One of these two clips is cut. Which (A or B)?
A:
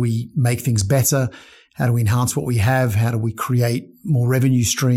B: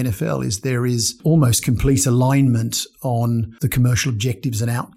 B